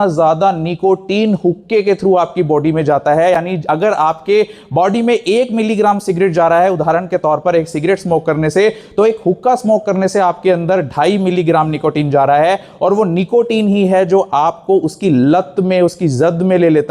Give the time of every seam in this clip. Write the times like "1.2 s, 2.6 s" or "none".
none

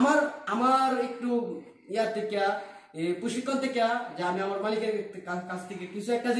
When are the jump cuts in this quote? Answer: none

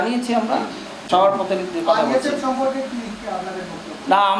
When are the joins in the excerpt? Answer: 1.0 s

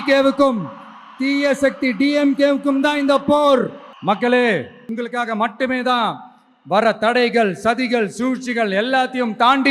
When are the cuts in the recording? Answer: 3.9 s, 4.9 s

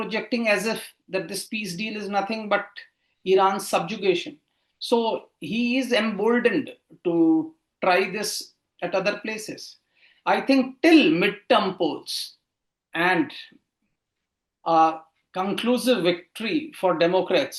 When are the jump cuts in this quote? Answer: none

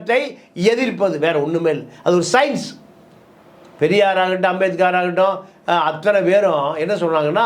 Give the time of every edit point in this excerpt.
none

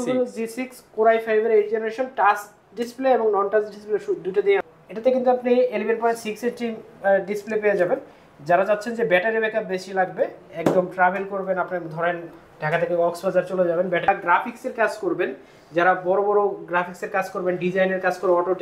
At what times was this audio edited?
4.7 s, 14.1 s

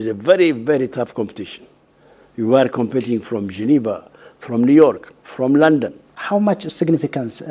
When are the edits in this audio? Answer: 6.1 s

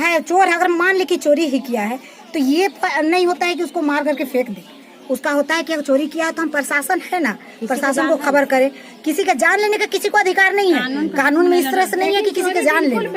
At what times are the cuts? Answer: none

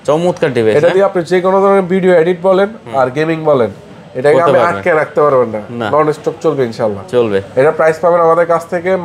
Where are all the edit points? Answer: none

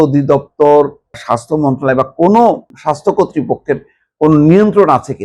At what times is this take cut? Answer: 1.2 s, 2.7 s

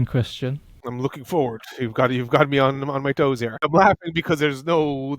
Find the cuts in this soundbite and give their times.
3.7 s

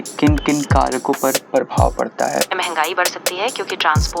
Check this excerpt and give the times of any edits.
2.5 s

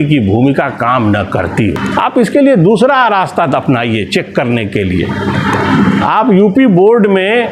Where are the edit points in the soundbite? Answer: 1.8 s

